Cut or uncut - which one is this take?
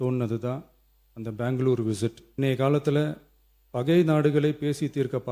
cut